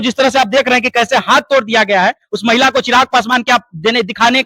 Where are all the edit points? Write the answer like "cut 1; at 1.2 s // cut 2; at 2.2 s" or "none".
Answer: none